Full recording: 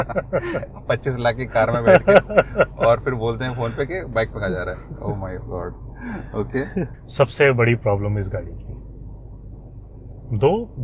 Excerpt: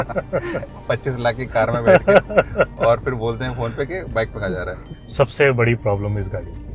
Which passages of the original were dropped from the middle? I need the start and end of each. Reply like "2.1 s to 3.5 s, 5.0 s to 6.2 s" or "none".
5.0 s to 7.0 s